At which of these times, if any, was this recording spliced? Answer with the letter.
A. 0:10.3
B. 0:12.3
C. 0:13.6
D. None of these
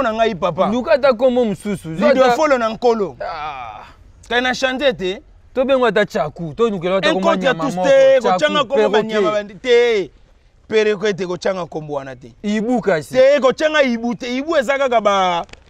D